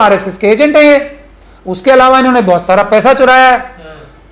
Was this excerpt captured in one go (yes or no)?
yes